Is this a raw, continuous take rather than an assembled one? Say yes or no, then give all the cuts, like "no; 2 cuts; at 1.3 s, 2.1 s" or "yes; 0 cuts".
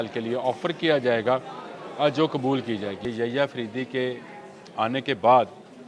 no; 1 cut; at 3.0 s